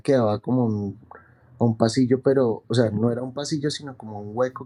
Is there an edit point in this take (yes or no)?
no